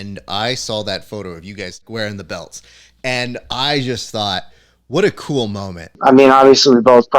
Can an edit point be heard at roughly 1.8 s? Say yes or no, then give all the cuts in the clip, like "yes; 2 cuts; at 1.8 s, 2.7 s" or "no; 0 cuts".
yes; 2 cuts; at 1.8 s, 5.9 s